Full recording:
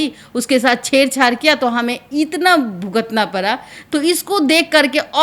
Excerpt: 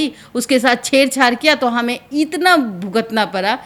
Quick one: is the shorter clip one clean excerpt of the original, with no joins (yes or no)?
yes